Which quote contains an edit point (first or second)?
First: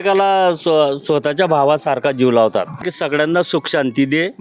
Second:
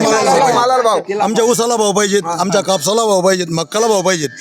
first